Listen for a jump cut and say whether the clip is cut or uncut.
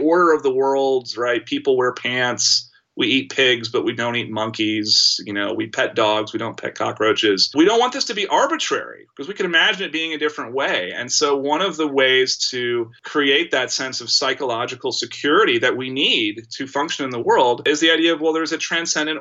uncut